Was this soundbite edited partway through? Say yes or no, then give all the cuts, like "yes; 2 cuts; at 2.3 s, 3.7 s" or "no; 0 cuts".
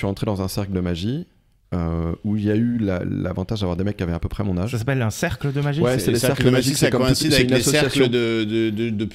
no; 0 cuts